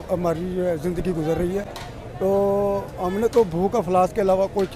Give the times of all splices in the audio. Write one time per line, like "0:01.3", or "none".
none